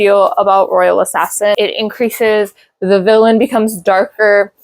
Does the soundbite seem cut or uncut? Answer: cut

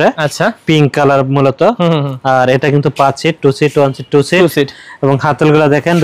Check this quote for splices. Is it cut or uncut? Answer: uncut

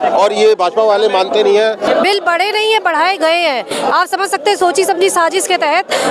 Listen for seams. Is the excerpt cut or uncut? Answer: cut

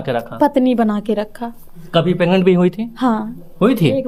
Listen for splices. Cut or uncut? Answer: uncut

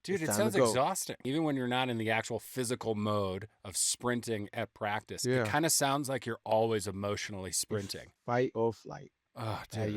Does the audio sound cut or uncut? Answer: cut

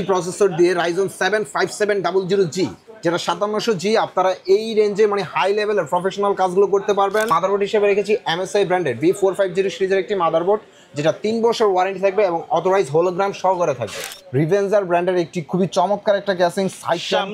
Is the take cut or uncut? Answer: cut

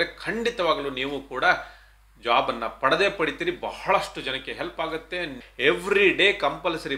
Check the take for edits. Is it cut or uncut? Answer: cut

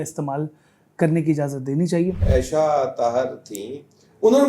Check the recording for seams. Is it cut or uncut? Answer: cut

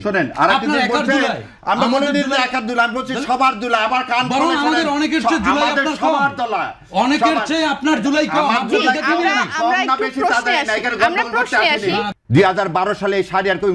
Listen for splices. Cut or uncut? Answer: cut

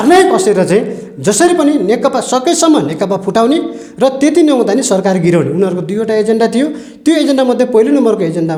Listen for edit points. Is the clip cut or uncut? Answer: uncut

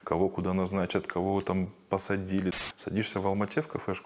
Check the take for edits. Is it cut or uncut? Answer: cut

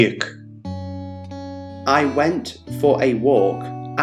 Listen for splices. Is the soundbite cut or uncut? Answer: uncut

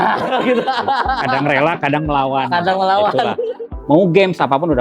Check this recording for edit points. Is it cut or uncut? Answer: cut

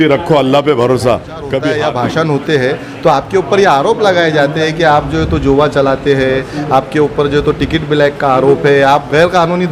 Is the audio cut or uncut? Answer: cut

